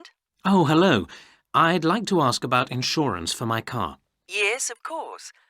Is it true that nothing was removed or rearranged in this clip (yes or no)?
yes